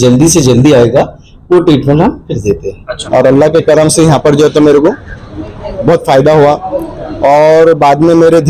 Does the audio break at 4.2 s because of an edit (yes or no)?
no